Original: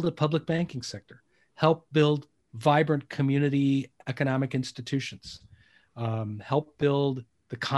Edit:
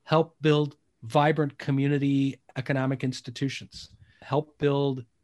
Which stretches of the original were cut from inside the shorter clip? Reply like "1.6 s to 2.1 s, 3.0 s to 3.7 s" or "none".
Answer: 5.7 s to 6.4 s